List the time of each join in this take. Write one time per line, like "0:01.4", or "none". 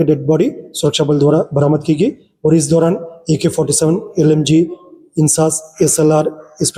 none